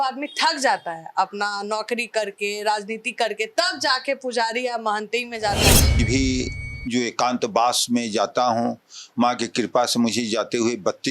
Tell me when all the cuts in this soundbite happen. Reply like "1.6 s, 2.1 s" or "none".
6.0 s